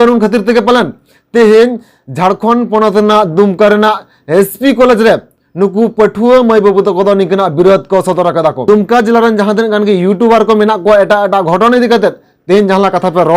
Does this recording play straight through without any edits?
no; 1 cut; at 8.6 s

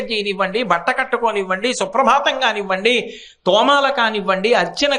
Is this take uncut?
yes; 0 cuts

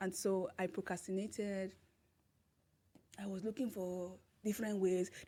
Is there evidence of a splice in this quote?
no; 0 cuts

